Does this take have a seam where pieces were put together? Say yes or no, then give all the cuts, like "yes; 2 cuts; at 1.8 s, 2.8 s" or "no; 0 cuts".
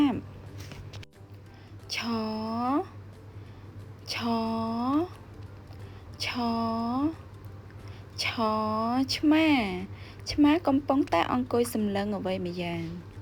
yes; 1 cut; at 1.2 s